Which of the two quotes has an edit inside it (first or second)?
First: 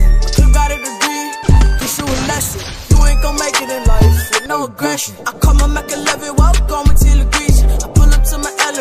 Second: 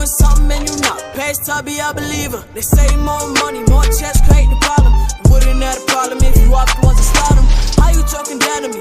first